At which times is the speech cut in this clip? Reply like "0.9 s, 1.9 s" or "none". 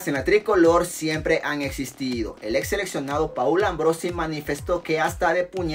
none